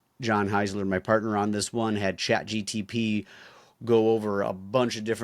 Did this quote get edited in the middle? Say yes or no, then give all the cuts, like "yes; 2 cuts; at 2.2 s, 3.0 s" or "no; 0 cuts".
no; 0 cuts